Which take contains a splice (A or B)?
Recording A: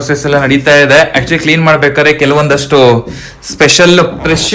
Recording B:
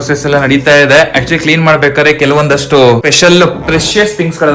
B